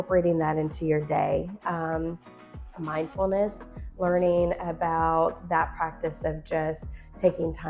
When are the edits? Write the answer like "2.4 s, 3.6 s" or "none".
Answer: none